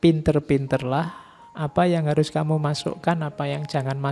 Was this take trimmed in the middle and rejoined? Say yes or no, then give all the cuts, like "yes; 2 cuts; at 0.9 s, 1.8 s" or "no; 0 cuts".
no; 0 cuts